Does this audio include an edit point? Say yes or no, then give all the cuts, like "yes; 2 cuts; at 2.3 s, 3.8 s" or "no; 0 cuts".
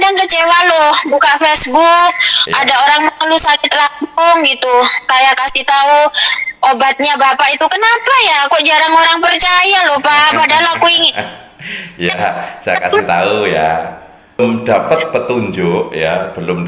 yes; 1 cut; at 14.4 s